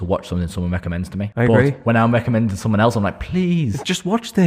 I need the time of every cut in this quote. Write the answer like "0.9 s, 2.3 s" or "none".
1.3 s